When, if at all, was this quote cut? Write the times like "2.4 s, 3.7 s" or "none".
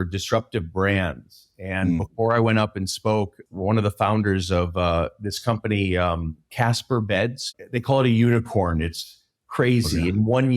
3.4 s, 6.5 s, 7.5 s